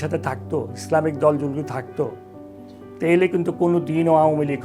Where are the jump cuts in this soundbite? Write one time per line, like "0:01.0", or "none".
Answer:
none